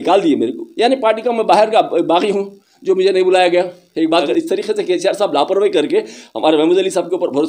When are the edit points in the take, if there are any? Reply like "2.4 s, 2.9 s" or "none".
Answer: 4.3 s